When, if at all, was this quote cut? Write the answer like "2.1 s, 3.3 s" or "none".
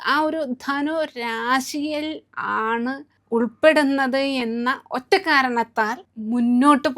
3.1 s, 6.0 s

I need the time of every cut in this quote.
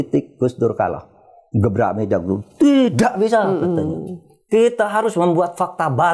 none

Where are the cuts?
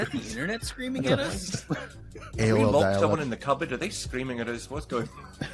none

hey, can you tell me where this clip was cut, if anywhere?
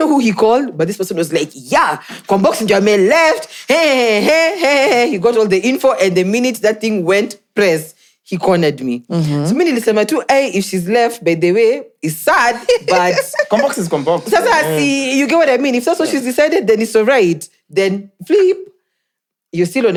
none

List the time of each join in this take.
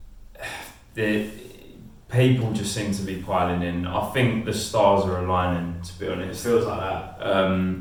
none

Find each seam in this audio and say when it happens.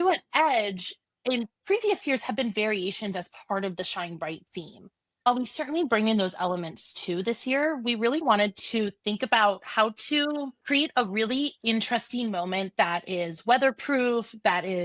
8.2 s

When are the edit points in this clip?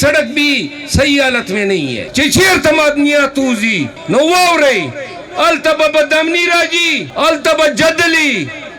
2.0 s, 3.9 s, 7.0 s

